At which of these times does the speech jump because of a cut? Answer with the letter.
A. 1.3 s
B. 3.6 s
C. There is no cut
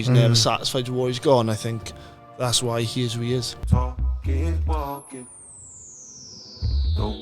B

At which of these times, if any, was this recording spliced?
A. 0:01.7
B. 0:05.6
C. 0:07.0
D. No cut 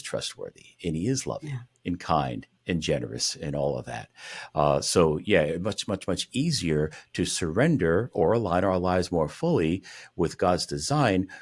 D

